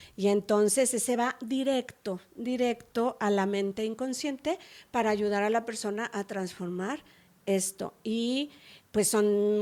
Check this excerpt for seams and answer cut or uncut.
uncut